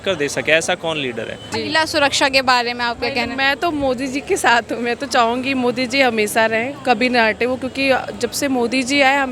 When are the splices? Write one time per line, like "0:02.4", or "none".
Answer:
0:01.5